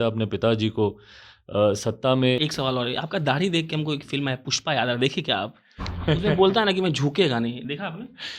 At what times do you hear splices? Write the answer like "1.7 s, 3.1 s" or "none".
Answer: 2.4 s

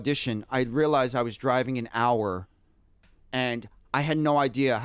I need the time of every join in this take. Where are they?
none

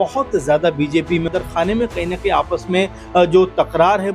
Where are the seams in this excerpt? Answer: 1.3 s

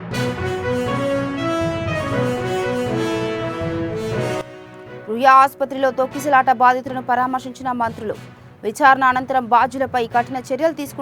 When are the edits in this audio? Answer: 4.6 s

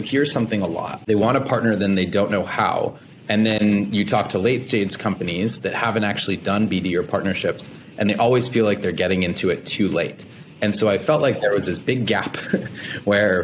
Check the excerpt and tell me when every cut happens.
0.9 s

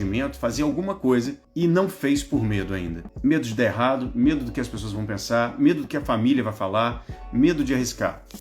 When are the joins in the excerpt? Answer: 1.4 s, 3.0 s

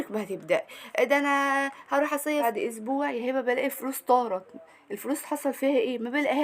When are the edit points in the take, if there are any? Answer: 2.4 s

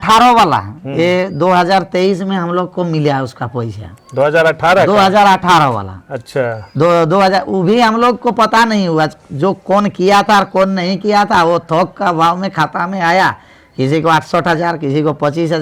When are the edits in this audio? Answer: none

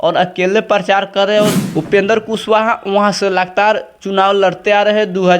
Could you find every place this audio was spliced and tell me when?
1.6 s

